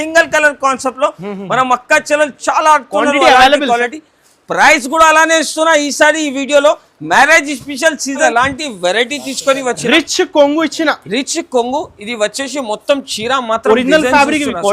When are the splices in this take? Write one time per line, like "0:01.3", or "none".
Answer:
0:08.3